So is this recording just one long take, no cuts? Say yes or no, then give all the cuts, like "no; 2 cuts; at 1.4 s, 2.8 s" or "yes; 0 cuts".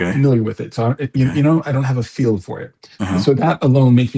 yes; 0 cuts